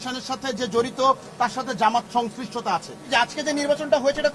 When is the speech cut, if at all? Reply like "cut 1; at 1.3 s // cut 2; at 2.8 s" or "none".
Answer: cut 1; at 3.0 s